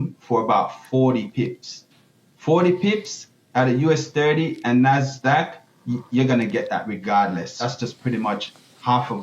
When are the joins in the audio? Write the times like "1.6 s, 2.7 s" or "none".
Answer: 7.6 s